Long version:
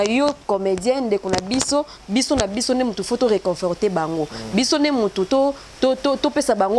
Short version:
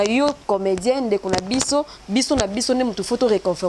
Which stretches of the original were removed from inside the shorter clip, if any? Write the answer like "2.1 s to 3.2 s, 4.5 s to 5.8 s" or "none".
none